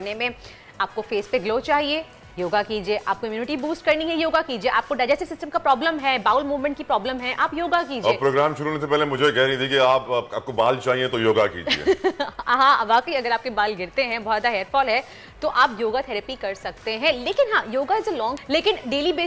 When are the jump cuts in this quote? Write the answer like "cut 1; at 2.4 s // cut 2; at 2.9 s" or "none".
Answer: none